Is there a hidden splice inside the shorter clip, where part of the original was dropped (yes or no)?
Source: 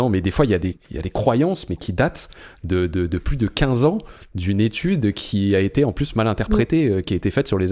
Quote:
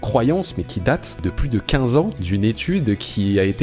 yes